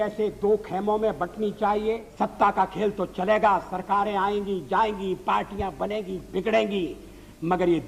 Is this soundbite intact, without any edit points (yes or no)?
no